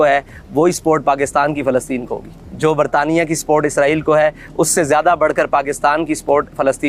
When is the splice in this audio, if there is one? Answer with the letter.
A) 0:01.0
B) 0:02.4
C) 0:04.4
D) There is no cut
D